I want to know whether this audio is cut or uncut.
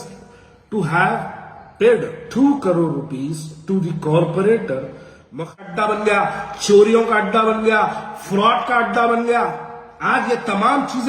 cut